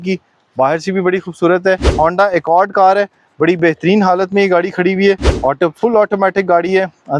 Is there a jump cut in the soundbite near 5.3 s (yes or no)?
yes